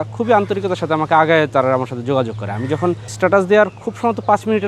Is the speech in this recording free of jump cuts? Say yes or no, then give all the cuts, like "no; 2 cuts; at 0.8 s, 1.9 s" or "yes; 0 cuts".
no; 1 cut; at 3.0 s